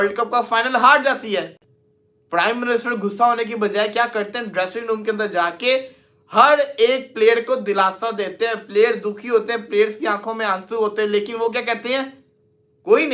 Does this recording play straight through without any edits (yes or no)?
yes